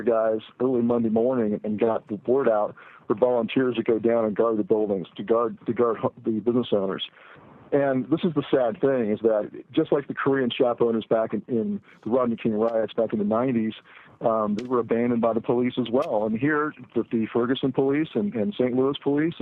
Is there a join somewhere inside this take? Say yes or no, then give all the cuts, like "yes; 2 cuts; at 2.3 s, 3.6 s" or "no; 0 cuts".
no; 0 cuts